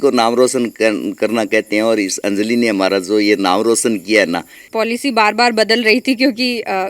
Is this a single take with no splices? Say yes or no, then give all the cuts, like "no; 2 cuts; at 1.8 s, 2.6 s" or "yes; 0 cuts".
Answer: no; 1 cut; at 4.6 s